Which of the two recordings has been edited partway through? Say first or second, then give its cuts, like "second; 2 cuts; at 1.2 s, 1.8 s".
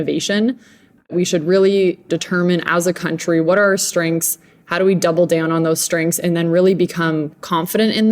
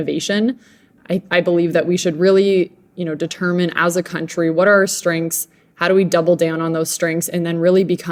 first; 2 cuts; at 1.1 s, 2.1 s